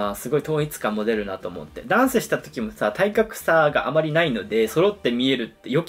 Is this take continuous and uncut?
yes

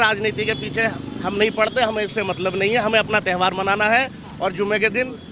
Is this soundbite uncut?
yes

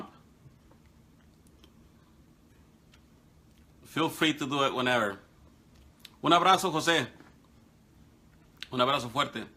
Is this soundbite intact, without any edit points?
yes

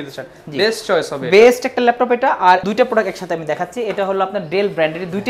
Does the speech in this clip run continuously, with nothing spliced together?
no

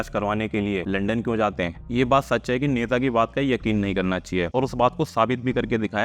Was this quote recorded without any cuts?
no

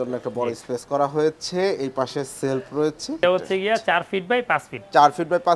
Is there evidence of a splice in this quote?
yes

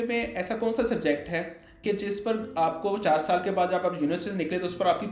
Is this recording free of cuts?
yes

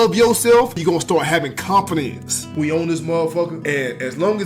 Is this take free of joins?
no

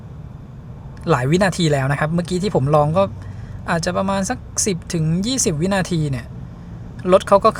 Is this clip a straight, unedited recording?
yes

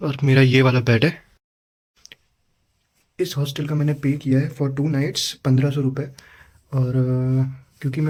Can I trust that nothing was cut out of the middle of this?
yes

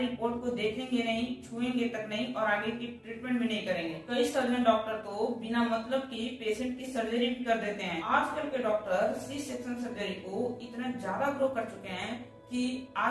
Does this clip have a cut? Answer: yes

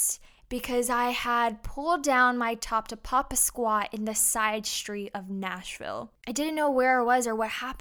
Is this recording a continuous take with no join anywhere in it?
no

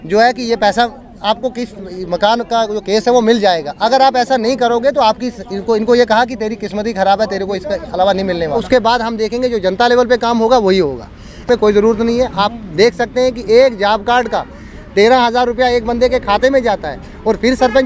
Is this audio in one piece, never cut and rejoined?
no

